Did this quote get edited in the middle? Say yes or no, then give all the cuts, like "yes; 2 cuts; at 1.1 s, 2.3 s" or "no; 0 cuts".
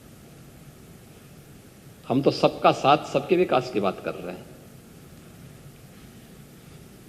no; 0 cuts